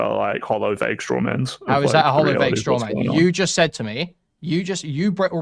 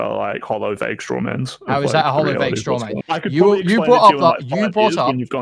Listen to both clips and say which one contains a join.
second; 1 cut; at 2.9 s

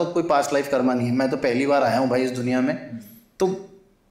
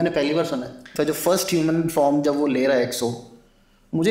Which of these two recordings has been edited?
second; 1 cut; at 0.9 s

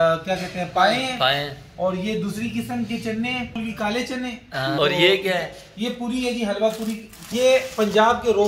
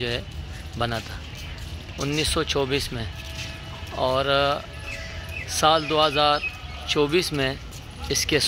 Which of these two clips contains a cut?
first; 3 cuts; at 3.6 s, 4.8 s, 7.3 s

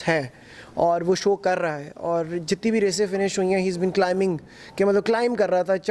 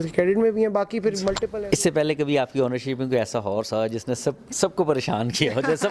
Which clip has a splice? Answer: second; 1 cut; at 1.5 s

